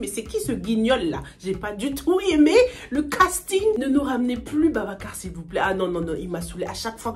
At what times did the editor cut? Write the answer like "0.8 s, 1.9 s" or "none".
3.8 s